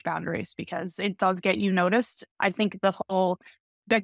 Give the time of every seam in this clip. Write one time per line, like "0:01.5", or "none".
0:02.2